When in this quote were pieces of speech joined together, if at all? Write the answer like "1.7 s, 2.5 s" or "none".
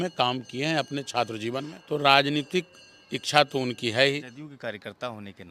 1.7 s, 4.3 s